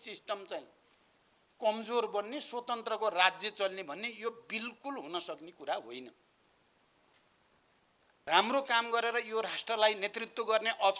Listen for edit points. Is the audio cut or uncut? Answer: cut